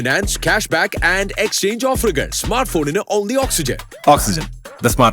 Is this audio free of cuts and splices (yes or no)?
yes